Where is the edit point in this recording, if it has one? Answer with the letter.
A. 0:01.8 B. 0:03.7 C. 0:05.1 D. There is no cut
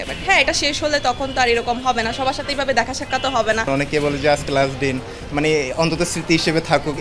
B